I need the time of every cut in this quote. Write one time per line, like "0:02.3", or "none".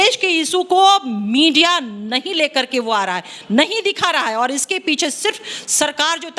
none